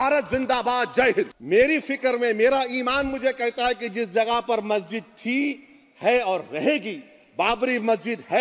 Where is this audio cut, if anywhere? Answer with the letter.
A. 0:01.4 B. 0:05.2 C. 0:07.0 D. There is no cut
A